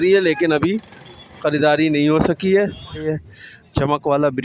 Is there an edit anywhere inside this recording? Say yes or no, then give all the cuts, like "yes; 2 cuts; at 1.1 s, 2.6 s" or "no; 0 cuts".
yes; 1 cut; at 3.2 s